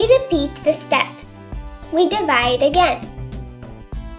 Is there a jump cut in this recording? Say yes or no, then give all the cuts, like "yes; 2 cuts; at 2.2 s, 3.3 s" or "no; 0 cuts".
yes; 1 cut; at 3.0 s